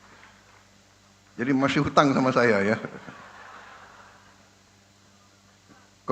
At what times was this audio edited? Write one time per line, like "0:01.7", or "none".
none